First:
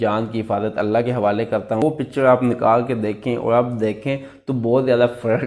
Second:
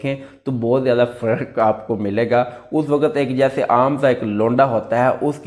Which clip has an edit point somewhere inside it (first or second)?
first